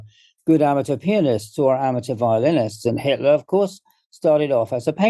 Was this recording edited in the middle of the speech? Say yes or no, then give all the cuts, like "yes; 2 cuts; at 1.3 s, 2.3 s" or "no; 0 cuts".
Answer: no; 0 cuts